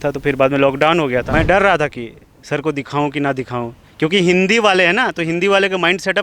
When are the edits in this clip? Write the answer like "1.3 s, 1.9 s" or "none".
1.3 s